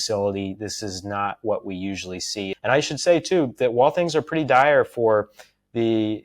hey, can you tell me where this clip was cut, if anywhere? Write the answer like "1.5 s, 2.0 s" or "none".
2.5 s